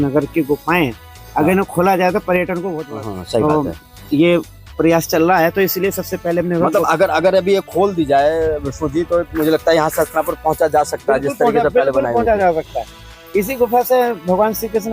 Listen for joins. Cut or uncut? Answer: cut